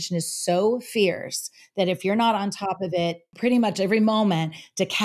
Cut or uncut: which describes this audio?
cut